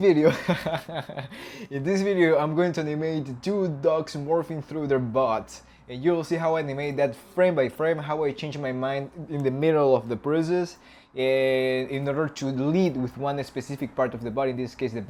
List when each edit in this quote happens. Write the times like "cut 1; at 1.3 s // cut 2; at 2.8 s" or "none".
none